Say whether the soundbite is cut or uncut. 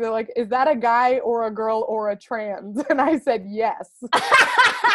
uncut